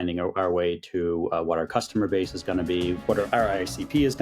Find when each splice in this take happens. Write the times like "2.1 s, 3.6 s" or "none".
3.1 s